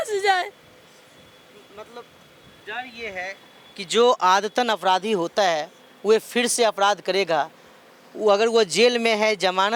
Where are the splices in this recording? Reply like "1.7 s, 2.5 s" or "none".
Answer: none